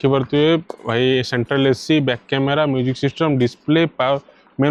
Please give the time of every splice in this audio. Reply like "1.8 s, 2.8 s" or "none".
none